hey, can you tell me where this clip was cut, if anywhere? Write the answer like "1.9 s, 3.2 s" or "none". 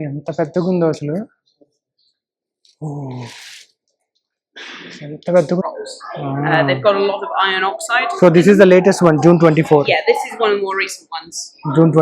5.6 s